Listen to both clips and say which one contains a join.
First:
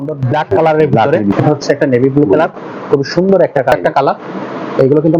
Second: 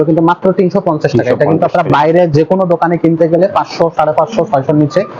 first; 2 cuts; at 1.4 s, 3.7 s

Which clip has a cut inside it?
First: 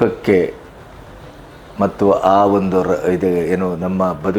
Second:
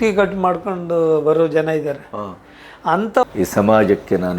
second; 1 cut; at 3.2 s

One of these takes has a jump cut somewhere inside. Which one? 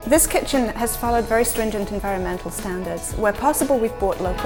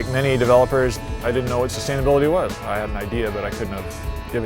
second; 2 cuts; at 1.0 s, 2.6 s

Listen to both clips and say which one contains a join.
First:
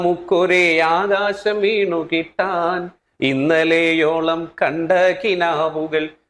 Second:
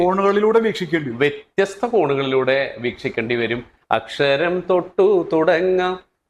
second; 1 cut; at 3.7 s

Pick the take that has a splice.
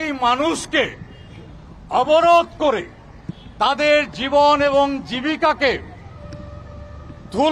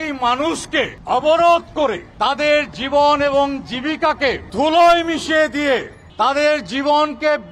second; 4 cuts; at 1.0 s, 2.1 s, 4.4 s, 6.0 s

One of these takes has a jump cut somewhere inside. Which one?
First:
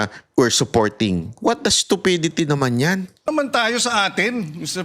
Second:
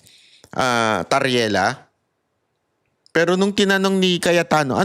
first; 1 cut; at 3.1 s

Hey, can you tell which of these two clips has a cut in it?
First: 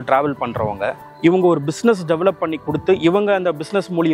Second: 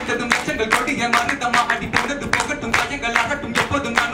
first; 1 cut; at 1.0 s

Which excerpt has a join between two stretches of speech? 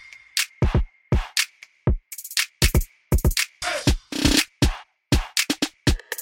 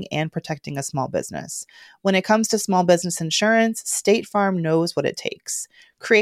first; 1 cut; at 1.0 s

